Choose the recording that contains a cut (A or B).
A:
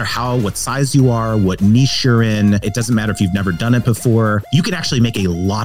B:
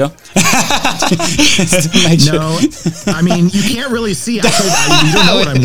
A